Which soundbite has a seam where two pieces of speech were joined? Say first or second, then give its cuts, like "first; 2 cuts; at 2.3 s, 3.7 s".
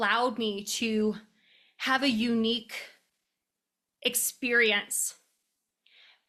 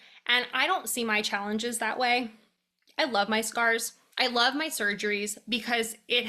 second; 1 cut; at 4.0 s